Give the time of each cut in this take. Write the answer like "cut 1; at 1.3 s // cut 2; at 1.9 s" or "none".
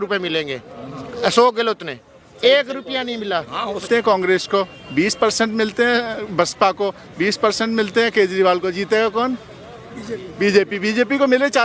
cut 1; at 3.8 s